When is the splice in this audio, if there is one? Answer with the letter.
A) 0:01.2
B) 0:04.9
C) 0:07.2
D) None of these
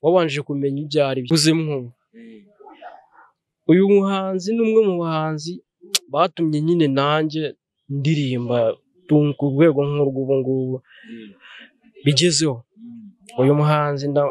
A